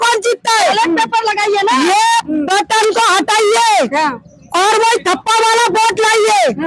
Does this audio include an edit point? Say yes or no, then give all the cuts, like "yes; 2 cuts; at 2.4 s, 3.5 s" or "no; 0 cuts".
no; 0 cuts